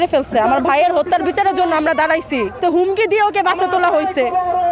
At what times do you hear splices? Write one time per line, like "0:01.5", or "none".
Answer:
0:02.6